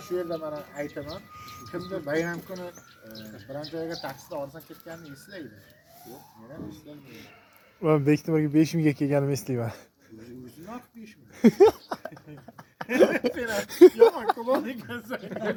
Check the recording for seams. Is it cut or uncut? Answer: uncut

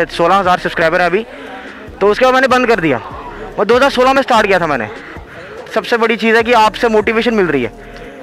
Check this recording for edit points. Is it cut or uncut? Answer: cut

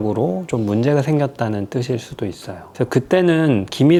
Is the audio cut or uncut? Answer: uncut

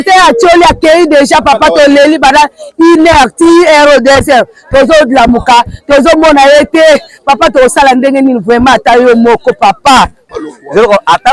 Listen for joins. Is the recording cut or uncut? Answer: cut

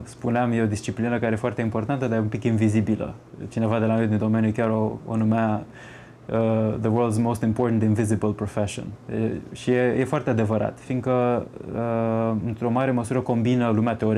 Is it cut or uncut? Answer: uncut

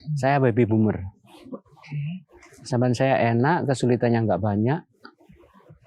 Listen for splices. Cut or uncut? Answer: uncut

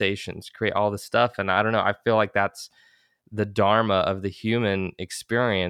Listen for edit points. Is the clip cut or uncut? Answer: uncut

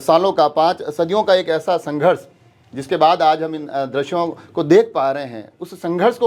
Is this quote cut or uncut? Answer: uncut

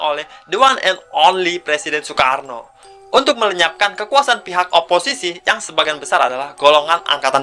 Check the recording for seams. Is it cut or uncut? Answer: uncut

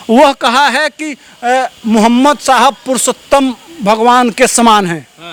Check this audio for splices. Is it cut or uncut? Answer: uncut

